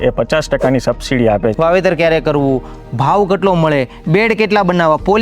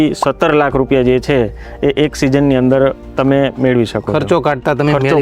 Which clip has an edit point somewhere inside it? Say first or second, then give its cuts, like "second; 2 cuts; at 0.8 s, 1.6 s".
first; 1 cut; at 1.5 s